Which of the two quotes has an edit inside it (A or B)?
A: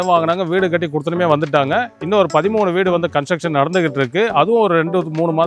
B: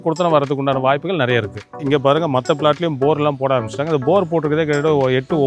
B